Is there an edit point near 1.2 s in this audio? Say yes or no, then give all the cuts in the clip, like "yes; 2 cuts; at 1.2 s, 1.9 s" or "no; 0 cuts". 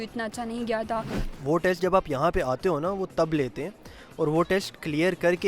yes; 1 cut; at 1.2 s